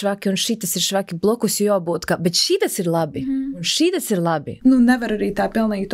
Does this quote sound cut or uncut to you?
cut